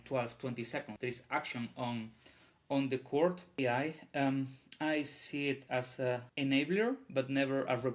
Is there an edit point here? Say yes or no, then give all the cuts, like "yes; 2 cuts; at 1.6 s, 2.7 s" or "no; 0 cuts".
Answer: yes; 3 cuts; at 0.9 s, 3.6 s, 6.3 s